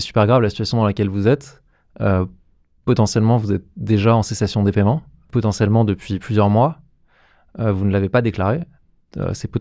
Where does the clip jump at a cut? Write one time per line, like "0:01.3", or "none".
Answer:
0:05.2